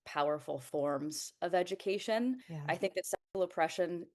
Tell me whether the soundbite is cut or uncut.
cut